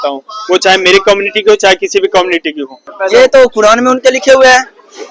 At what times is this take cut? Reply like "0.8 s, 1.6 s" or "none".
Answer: 2.9 s